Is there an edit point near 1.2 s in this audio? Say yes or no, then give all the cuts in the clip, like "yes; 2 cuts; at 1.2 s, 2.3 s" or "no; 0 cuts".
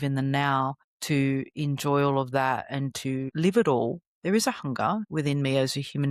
no; 2 cuts; at 3.3 s, 5.1 s